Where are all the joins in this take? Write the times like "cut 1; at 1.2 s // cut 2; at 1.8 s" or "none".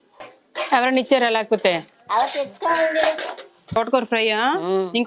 cut 1; at 1.9 s // cut 2; at 3.8 s